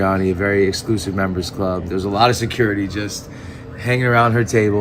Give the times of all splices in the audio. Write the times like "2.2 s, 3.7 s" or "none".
none